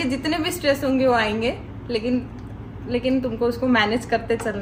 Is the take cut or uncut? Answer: uncut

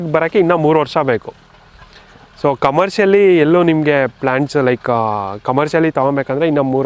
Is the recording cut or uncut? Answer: uncut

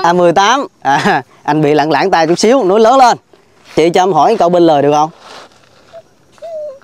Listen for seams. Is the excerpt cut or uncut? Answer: cut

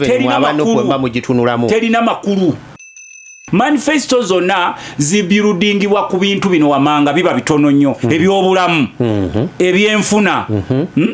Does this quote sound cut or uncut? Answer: cut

